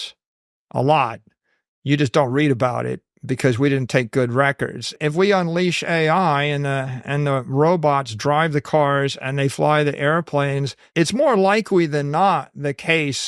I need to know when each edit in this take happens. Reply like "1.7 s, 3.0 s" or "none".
5.0 s